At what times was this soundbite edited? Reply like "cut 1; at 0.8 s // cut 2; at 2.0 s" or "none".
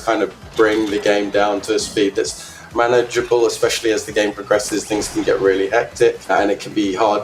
cut 1; at 6.3 s